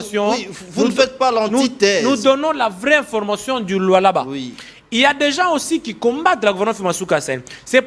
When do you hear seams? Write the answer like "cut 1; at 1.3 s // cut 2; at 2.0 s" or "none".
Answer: none